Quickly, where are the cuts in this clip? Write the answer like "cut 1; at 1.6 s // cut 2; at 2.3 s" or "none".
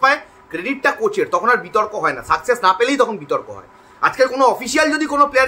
none